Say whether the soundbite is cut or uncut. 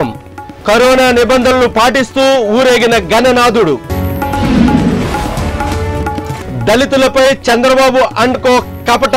uncut